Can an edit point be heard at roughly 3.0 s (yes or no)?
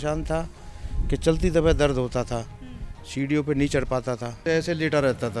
no